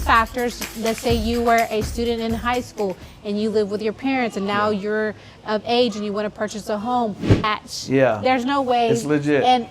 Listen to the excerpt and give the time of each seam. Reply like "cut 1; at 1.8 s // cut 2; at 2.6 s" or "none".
cut 1; at 7.4 s